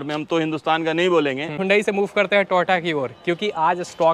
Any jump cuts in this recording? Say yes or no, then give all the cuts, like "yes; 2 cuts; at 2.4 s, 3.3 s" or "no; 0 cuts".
yes; 1 cut; at 1.6 s